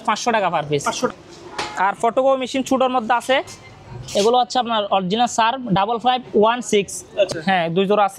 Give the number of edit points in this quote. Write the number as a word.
two